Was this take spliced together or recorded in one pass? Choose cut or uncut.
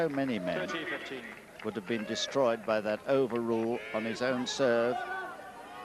cut